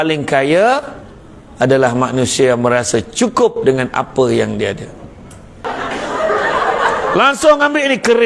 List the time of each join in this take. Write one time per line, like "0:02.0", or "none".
0:05.7